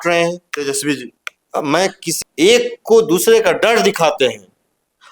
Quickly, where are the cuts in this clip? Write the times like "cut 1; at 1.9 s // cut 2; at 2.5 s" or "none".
cut 1; at 2.1 s